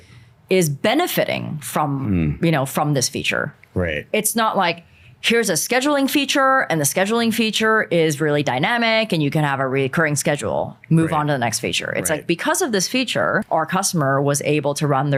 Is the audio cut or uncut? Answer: uncut